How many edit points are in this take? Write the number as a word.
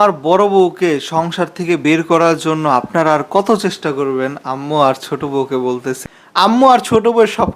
one